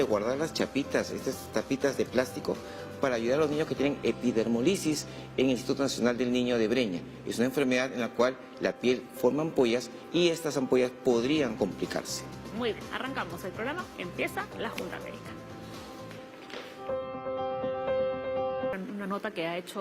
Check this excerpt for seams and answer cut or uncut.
cut